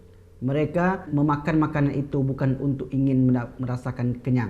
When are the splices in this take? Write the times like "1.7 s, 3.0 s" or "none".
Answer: 1.1 s